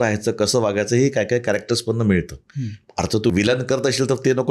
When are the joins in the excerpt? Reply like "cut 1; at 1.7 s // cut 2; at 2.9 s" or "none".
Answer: cut 1; at 3.3 s